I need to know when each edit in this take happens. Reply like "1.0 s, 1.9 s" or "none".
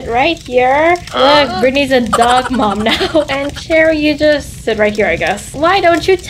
1.5 s, 5.5 s